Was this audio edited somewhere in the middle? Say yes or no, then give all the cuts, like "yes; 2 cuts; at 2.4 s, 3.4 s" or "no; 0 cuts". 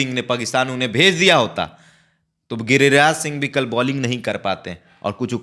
no; 0 cuts